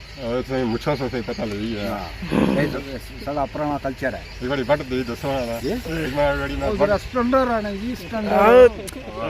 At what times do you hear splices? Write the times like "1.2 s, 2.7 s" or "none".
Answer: none